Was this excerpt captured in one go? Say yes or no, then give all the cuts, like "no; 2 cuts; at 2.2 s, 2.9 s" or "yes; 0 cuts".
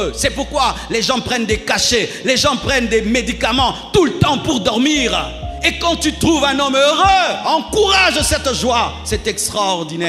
yes; 0 cuts